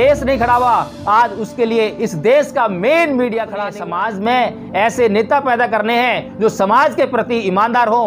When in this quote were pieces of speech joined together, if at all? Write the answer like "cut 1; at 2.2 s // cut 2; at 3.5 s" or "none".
cut 1; at 3.7 s

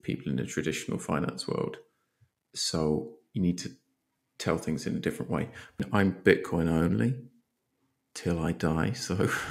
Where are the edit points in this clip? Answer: cut 1; at 5.8 s

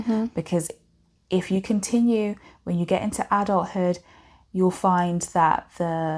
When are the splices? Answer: none

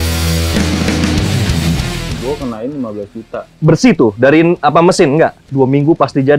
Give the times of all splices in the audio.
cut 1; at 2.1 s // cut 2; at 5.4 s

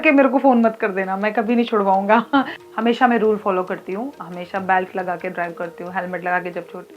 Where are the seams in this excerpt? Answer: cut 1; at 2.6 s

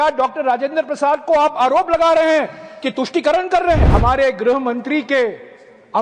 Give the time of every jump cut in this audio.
cut 1; at 3.9 s

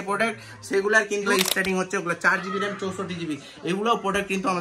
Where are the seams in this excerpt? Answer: cut 1; at 1.3 s

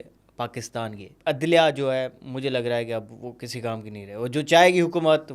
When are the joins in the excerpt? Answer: cut 1; at 1.1 s

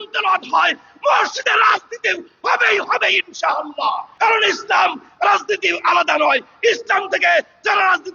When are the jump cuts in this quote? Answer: cut 1; at 4.1 s

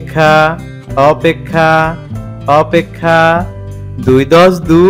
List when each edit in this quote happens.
none

